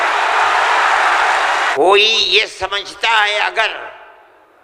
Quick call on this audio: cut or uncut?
cut